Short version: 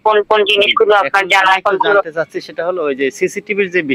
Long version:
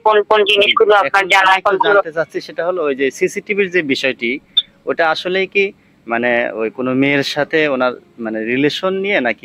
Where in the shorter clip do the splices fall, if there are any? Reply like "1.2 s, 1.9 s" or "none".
none